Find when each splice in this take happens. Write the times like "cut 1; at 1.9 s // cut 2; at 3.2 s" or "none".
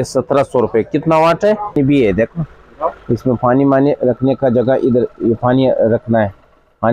cut 1; at 1.8 s